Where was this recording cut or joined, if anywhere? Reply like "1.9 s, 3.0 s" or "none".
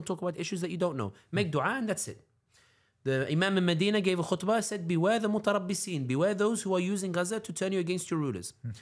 none

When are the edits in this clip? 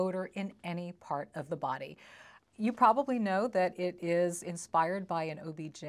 none

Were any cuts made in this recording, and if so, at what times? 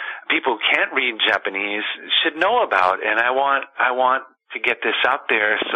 none

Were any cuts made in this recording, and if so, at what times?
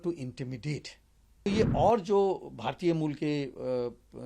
1.5 s

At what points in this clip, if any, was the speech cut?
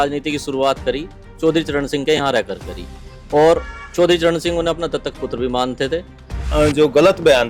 6.5 s

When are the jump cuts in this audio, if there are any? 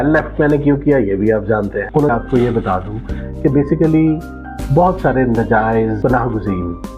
2.1 s

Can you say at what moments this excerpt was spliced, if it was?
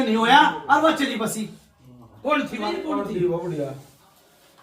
2.8 s

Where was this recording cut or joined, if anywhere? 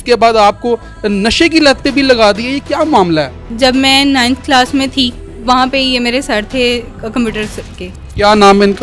3.5 s, 5.4 s

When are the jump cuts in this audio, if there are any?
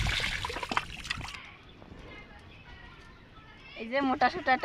1.3 s, 3.8 s

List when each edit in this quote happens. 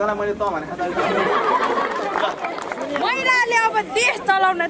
2.9 s

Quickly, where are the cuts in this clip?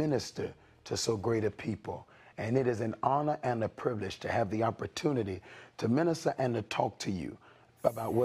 4.8 s

